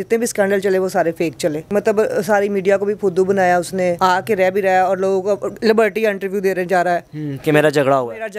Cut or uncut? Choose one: uncut